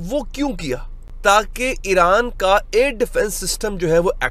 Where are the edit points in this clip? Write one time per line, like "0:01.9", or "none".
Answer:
0:00.9